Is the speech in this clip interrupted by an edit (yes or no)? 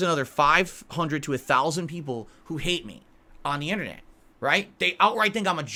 no